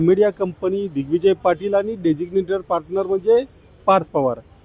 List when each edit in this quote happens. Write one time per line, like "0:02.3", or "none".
none